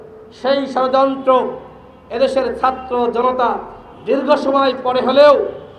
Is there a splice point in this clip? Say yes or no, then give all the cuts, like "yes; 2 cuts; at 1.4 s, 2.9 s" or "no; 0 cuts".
no; 0 cuts